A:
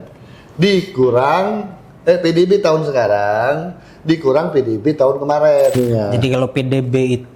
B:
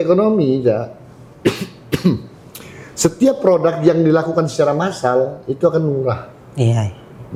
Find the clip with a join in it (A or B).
A